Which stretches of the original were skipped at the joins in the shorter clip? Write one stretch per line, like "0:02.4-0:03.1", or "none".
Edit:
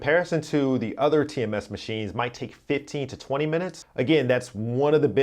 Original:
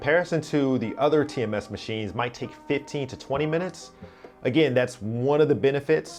0:03.8-0:04.3

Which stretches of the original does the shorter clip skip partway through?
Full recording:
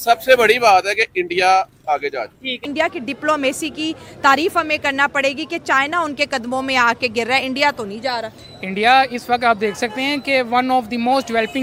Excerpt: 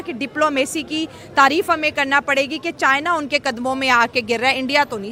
none

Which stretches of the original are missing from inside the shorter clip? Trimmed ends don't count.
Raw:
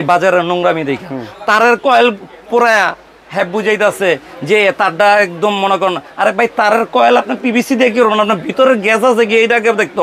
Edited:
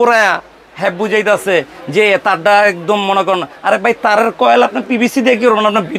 none

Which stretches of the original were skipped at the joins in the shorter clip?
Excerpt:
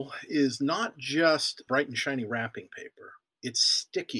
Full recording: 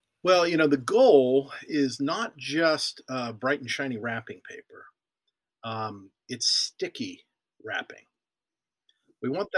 0:03.0-0:03.3
0:05.0-0:06.1

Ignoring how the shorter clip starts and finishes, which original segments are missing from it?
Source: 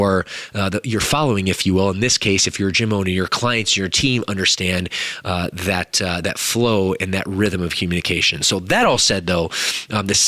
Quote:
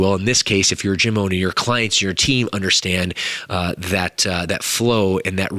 none

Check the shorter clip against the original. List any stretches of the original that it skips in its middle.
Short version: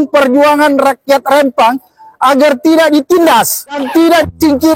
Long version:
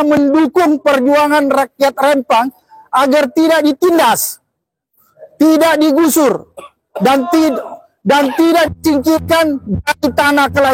0:04.6-0:08.3

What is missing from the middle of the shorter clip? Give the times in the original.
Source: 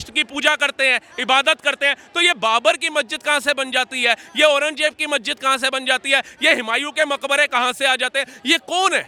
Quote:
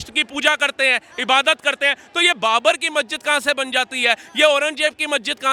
none

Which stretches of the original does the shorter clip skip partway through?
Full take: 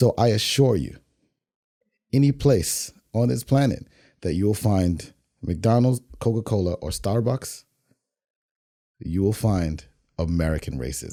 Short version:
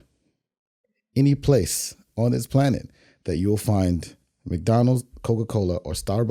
none

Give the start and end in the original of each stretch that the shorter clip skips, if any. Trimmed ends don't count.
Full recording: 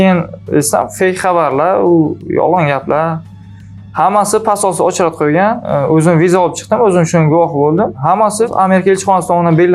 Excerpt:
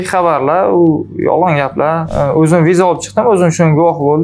0:03.2-0:05.6

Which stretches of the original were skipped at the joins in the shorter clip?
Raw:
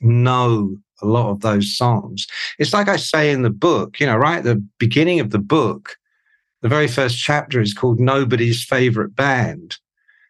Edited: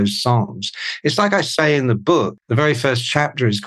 0:03.9-0:06.5

